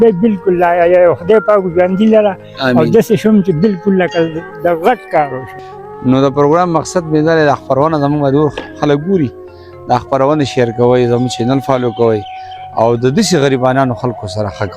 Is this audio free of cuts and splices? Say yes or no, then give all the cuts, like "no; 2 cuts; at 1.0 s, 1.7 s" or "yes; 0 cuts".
no; 1 cut; at 5.5 s